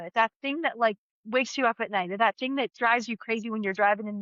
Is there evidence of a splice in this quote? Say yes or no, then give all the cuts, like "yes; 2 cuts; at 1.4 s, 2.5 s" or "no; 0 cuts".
yes; 2 cuts; at 1.1 s, 2.7 s